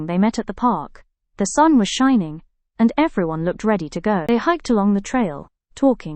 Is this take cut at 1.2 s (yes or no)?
no